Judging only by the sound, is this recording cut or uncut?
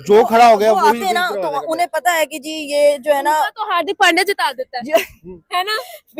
uncut